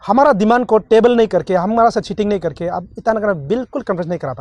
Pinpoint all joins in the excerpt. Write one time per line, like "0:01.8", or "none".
none

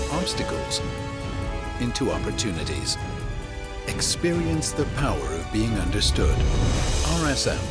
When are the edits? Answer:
none

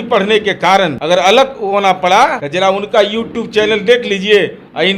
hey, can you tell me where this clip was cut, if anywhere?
0:01.0
0:02.4

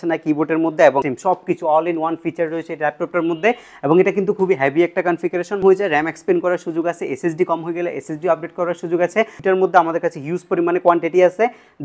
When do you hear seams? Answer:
0:01.1
0:05.6
0:09.4

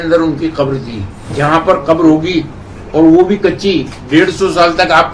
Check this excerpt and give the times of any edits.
0:01.3

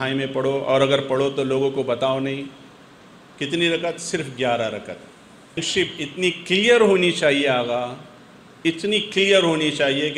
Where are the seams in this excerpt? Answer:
0:05.6

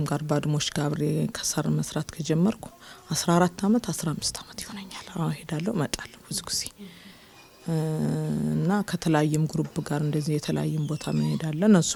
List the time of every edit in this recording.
none

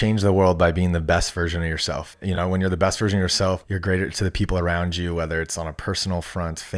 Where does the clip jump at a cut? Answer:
0:02.1
0:03.7

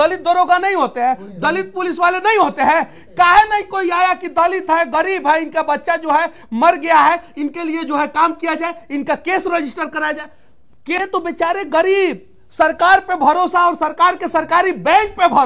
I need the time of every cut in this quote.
0:11.0

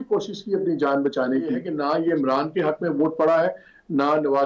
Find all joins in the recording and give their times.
0:01.7

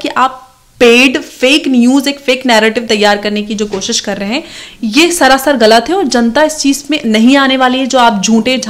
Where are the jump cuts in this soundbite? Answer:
none

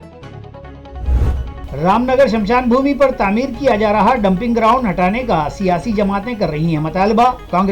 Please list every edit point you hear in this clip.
0:01.2

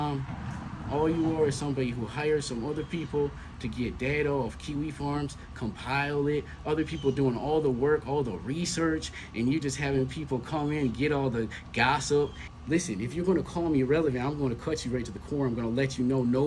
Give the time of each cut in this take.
0:12.4

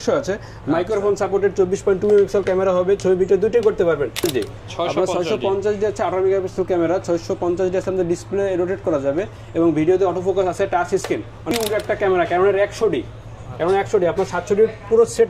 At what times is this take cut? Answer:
0:04.3
0:11.4

